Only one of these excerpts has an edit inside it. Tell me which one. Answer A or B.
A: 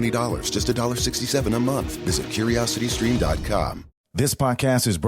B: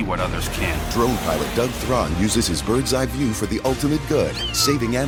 A